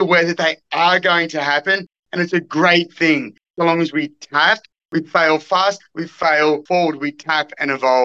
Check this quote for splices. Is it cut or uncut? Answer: cut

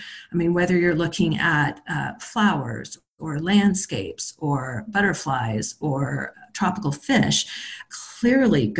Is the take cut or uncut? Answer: uncut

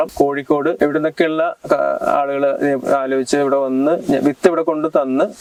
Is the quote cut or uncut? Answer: uncut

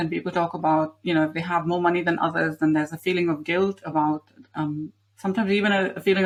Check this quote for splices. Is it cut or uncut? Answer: uncut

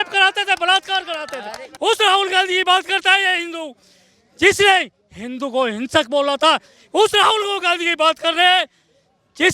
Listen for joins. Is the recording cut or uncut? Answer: cut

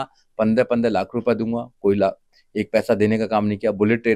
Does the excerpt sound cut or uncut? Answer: uncut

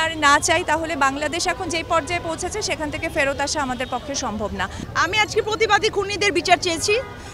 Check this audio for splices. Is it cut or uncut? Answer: uncut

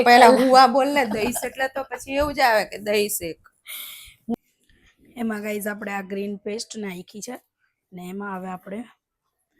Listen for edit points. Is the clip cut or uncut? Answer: cut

